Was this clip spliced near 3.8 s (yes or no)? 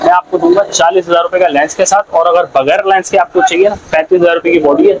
no